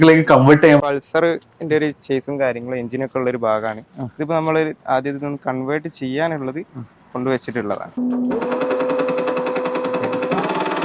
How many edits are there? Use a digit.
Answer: 2